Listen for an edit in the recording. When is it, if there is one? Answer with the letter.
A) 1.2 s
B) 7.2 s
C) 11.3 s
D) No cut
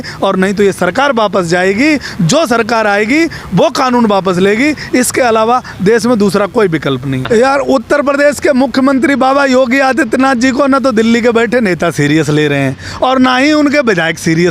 B